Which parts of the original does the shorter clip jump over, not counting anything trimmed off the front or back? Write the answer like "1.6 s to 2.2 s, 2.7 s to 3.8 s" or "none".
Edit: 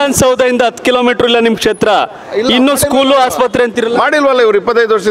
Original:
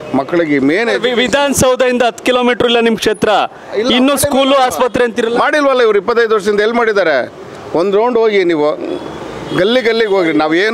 none